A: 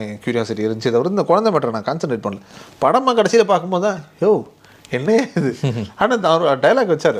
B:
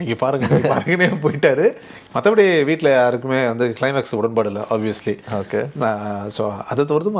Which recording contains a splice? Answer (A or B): B